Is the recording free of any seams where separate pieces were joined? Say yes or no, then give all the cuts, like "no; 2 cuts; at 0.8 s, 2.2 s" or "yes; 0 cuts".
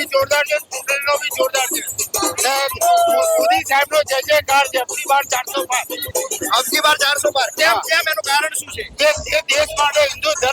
yes; 0 cuts